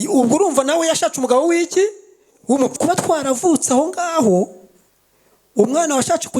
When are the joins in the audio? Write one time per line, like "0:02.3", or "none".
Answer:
0:02.8